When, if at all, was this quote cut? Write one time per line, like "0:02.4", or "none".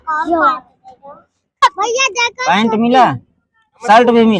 0:01.6